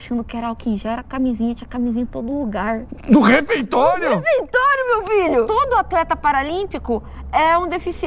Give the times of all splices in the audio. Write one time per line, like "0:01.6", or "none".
0:05.5

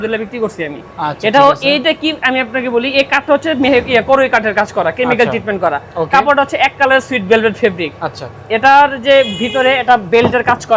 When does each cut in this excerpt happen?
none

